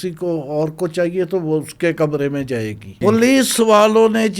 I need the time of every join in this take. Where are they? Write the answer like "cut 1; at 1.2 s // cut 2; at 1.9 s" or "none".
cut 1; at 3.0 s